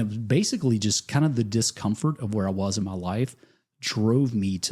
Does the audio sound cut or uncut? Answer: uncut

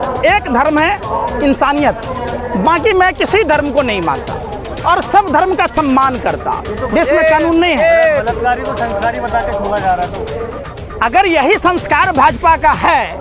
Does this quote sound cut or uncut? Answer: cut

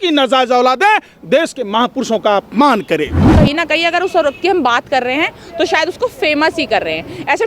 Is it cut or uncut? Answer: cut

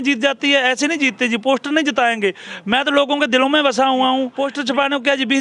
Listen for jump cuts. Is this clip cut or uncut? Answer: cut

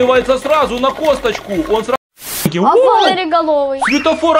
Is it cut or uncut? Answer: cut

